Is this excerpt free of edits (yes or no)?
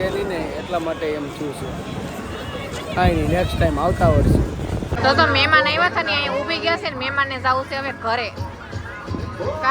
no